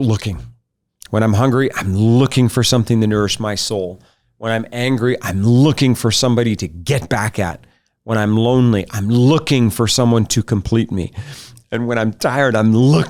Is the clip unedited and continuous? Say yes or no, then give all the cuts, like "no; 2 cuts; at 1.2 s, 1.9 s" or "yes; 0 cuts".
yes; 0 cuts